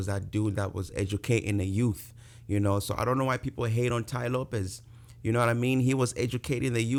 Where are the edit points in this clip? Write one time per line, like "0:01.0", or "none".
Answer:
none

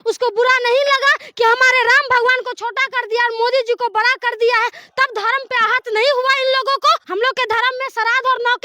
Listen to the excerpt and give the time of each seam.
0:07.0

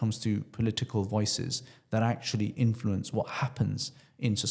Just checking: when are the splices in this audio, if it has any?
none

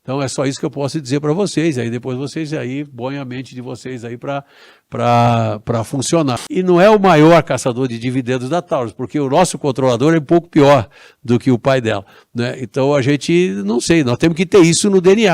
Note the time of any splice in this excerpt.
0:06.4

